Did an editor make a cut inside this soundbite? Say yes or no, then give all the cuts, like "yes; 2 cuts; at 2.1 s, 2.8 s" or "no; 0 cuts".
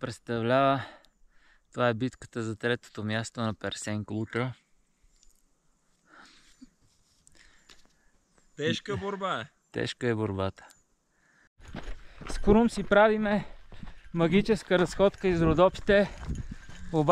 yes; 1 cut; at 11.6 s